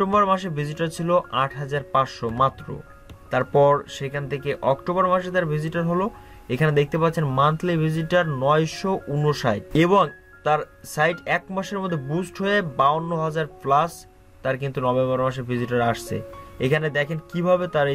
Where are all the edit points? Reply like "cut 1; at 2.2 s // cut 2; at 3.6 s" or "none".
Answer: none